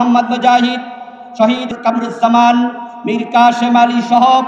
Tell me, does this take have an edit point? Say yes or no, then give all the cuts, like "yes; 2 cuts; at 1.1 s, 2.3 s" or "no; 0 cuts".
yes; 1 cut; at 1.7 s